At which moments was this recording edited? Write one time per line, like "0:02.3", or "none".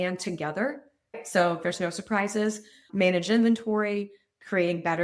0:01.2